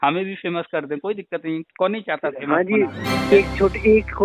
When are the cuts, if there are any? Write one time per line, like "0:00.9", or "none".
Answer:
0:03.2